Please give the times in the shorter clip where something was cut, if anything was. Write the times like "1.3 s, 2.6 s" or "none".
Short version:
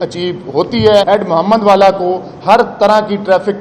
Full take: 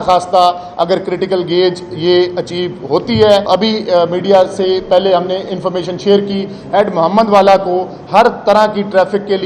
1.0 s